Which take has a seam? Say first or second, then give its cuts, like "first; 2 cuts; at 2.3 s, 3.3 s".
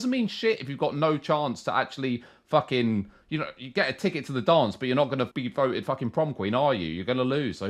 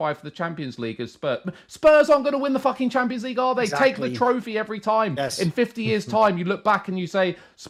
first; 1 cut; at 5.4 s